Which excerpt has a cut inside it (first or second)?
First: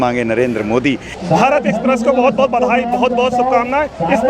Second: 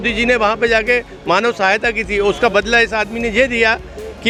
first